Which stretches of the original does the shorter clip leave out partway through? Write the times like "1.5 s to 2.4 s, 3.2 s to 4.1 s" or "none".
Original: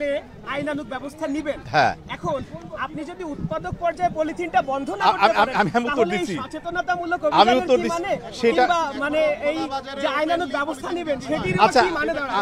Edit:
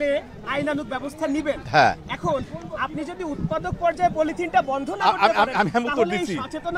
none